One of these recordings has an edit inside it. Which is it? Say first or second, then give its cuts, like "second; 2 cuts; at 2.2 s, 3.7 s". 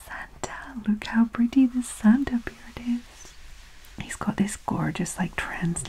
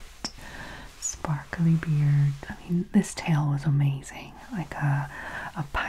second; 1 cut; at 2.5 s